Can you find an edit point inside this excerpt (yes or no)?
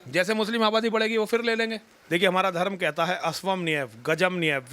yes